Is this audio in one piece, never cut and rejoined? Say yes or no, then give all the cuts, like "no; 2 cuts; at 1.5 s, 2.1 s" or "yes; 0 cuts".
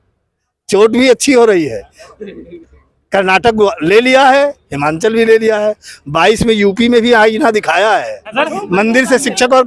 no; 1 cut; at 8.3 s